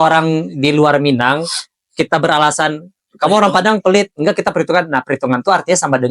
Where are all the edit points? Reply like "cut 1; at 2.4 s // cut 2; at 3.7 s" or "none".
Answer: none